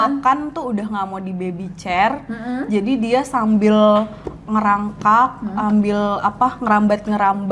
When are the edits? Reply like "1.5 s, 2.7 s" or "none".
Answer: none